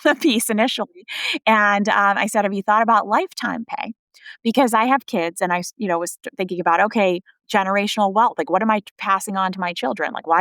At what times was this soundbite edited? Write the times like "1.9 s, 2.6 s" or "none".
7.3 s